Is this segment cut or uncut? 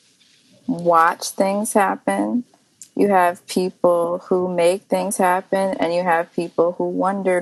uncut